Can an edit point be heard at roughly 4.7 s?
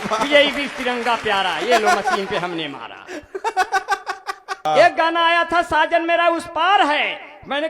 yes; 1 cut; at 4.7 s

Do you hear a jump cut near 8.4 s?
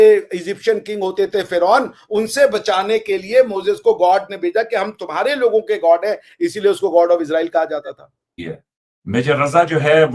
yes; 1 cut; at 8.4 s

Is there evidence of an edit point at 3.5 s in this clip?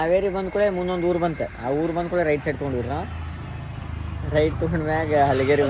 no; 0 cuts

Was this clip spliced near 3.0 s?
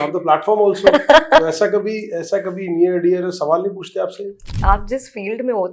no; 1 cut; at 4.5 s

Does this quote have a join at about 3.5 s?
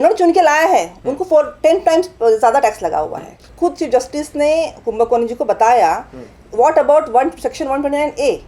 yes; 1 cut; at 3.5 s

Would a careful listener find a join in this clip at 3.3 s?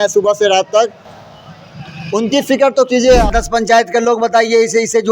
yes; 1 cut; at 3.3 s

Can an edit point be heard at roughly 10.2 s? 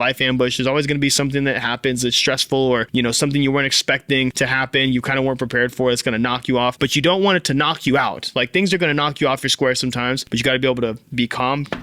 yes; 4 cuts; at 2.9 s, 4.3 s, 6.8 s, 10.2 s

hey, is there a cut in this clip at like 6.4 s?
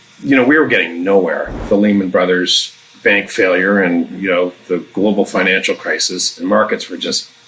yes; 2 cuts; at 1.5 s, 6.4 s

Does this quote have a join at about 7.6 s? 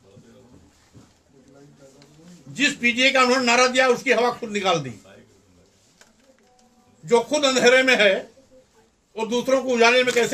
no; 0 cuts

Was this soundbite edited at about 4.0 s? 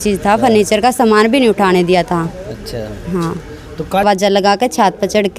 yes; 1 cut; at 4.0 s

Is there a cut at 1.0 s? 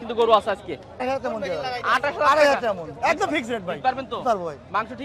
yes; 1 cut; at 1.0 s

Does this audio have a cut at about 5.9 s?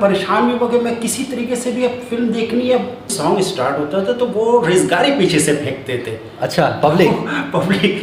no; 1 cut; at 3.1 s

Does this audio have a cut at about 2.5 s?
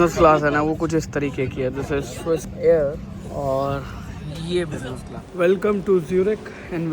yes; 2 cuts; at 2.5 s, 5.2 s

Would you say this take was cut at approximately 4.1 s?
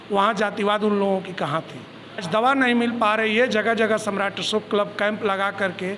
no; 1 cut; at 2.2 s

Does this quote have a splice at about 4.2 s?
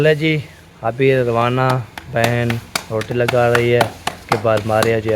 no; 0 cuts

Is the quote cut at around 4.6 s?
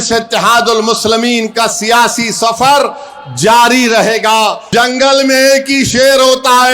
yes; 1 cut; at 4.6 s

